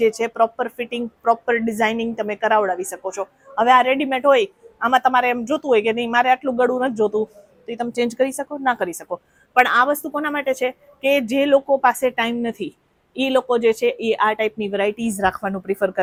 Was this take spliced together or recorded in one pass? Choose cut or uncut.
uncut